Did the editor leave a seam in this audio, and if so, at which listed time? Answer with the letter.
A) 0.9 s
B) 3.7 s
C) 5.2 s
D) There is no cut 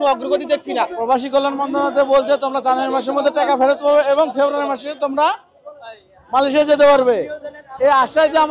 A